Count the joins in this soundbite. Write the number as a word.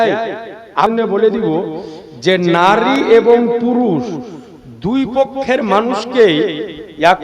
one